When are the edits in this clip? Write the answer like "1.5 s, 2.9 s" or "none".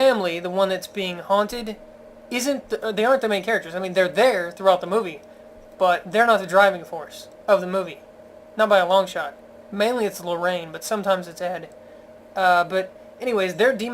12.5 s